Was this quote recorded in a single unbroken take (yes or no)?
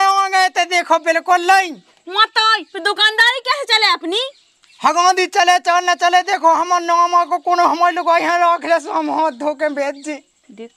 yes